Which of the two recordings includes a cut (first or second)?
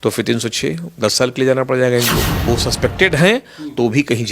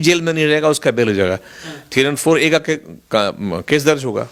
first